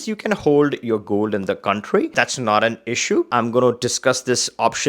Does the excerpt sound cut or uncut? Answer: cut